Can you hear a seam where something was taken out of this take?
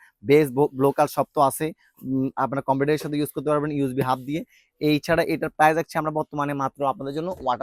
no; 0 cuts

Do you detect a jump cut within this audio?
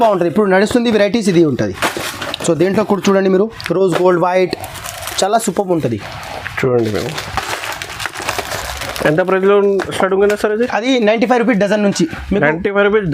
no; 0 cuts

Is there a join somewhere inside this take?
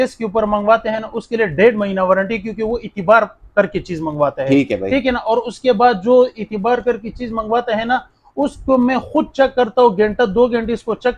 no; 0 cuts

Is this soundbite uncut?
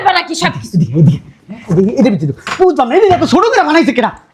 yes; 0 cuts

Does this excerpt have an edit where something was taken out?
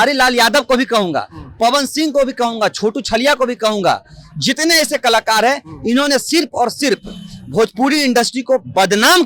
no; 0 cuts

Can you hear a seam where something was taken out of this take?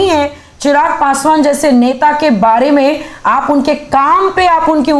no; 0 cuts

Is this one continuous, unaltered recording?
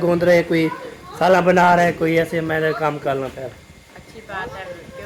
yes; 0 cuts

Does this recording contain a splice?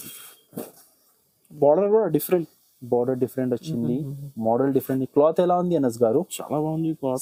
no; 0 cuts

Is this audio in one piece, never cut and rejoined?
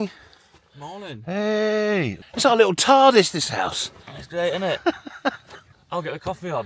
no; 2 cuts; at 2.2 s, 5.8 s

